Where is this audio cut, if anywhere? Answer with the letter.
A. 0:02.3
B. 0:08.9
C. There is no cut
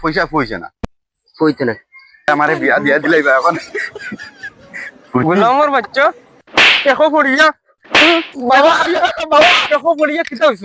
A